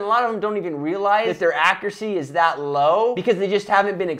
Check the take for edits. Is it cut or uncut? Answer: cut